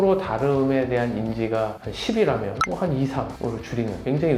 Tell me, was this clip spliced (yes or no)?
no